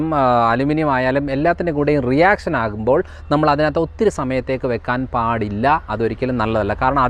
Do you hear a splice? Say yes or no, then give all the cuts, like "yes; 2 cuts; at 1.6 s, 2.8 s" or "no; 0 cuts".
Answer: no; 0 cuts